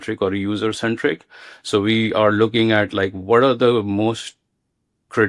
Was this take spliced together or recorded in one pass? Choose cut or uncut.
uncut